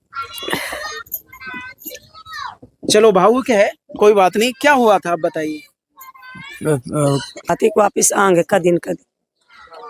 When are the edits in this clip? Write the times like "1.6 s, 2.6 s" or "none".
7.5 s

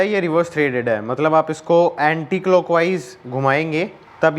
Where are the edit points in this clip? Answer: none

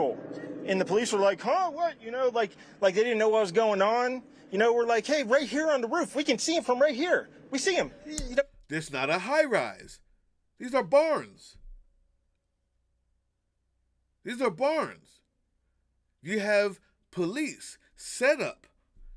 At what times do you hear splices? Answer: none

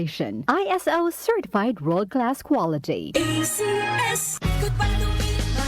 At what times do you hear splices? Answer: 4.3 s

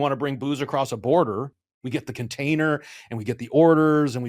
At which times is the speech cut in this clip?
1.8 s

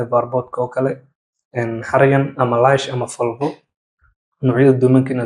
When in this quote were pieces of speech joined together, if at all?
none

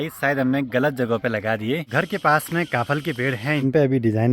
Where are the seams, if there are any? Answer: 1.9 s, 3.6 s

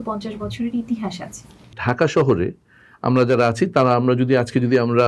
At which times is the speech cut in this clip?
1.8 s

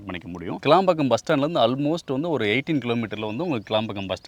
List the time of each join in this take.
none

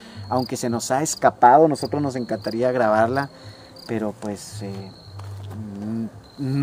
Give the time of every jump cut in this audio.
none

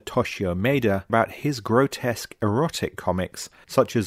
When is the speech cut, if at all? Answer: 1.1 s

